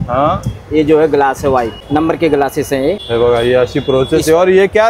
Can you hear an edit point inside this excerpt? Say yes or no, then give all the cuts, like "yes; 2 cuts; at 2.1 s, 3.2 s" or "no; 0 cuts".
yes; 2 cuts; at 1.8 s, 3.0 s